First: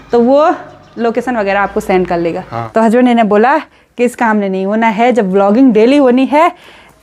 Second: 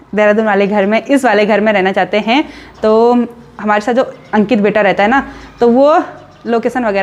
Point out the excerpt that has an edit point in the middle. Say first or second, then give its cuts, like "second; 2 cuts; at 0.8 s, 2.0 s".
first; 1 cut; at 2.5 s